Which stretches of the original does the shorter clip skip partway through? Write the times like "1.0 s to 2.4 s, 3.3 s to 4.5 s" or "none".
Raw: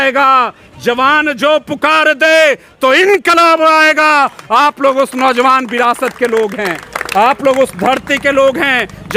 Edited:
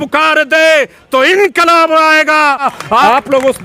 4.4 s to 6.8 s